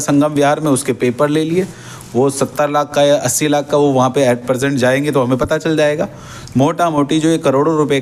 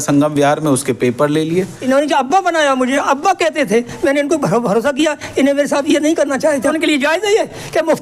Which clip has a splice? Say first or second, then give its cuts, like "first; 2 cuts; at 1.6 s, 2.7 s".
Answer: second; 2 cuts; at 1.8 s, 6.7 s